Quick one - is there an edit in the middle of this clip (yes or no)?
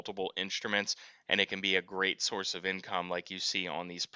no